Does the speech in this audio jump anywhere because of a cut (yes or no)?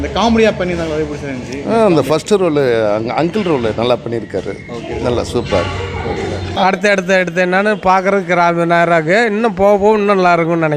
yes